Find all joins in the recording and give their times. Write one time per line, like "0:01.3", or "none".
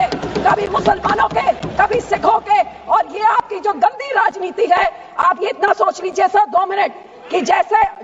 none